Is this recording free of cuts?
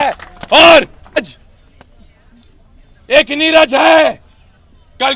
no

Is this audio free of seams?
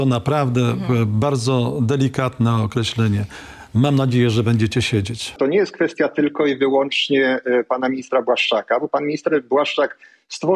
no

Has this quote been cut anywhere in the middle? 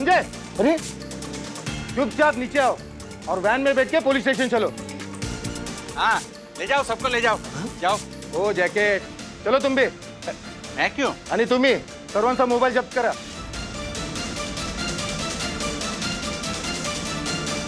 no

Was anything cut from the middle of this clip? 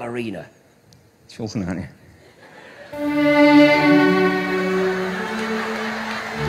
no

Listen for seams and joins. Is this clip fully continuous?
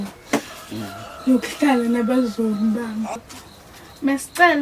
no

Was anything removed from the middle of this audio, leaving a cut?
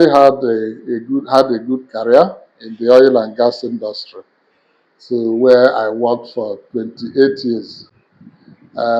no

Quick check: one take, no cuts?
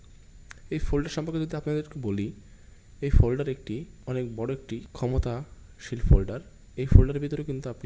no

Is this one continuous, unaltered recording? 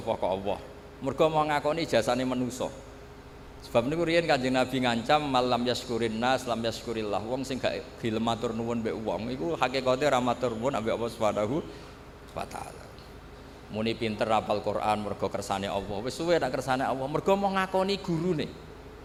yes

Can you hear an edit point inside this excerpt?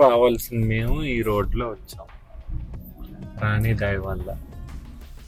no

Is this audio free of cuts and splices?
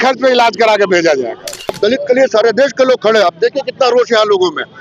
no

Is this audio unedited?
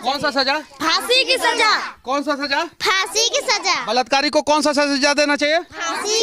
yes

